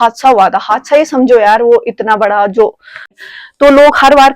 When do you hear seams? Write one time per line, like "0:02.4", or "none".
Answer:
0:03.2